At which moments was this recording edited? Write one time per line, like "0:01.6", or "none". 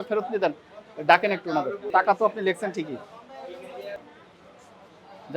0:01.8
0:04.0